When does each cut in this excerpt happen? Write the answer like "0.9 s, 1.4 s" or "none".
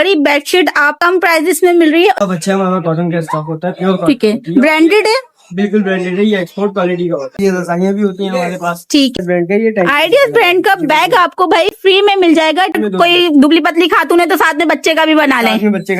1.0 s, 2.2 s, 7.4 s, 9.2 s, 12.8 s